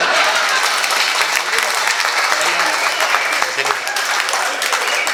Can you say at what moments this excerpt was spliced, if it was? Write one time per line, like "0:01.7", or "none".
none

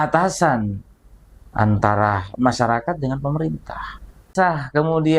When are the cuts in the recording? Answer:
0:04.3

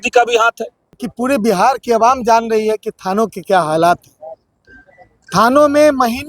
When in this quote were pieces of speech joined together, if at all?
0:01.0

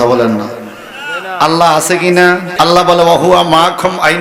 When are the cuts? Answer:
0:02.5

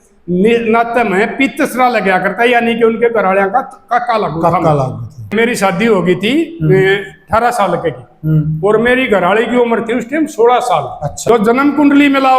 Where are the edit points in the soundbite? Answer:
0:05.3
0:11.1

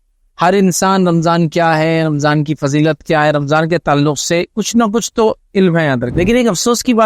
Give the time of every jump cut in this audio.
0:06.1

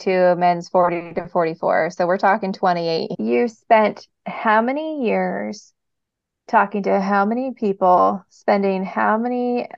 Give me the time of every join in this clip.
0:03.1

